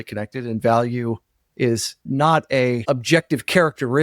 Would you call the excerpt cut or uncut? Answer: cut